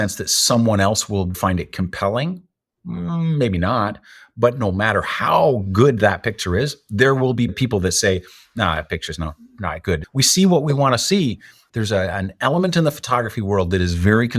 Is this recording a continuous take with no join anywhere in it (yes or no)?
no